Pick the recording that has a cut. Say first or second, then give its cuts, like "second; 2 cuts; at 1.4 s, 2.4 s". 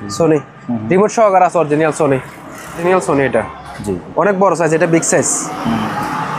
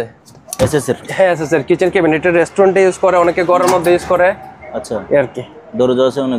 first; 1 cut; at 2.8 s